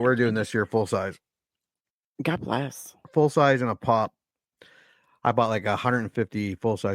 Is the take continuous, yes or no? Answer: yes